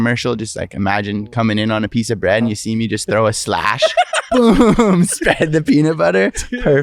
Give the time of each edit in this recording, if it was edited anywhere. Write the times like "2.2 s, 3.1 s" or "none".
none